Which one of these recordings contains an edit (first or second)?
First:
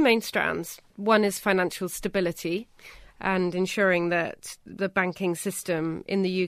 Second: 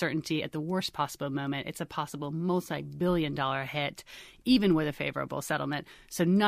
first